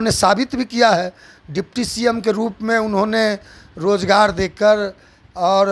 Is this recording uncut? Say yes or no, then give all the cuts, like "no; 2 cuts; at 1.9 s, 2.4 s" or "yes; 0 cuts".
yes; 0 cuts